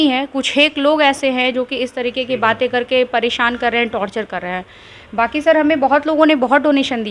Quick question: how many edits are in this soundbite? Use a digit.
0